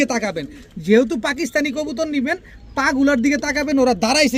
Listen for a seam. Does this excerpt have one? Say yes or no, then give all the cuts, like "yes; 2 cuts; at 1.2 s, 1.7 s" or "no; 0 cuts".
no; 0 cuts